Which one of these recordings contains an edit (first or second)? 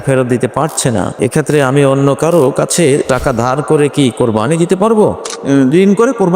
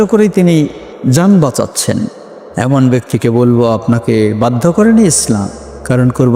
first